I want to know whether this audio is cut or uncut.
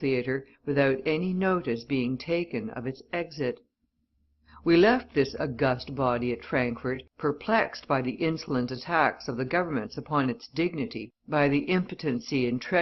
uncut